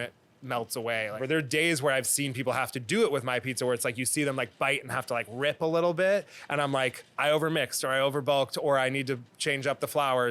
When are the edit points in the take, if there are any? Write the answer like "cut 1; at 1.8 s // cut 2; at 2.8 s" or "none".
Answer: cut 1; at 1.2 s // cut 2; at 7.0 s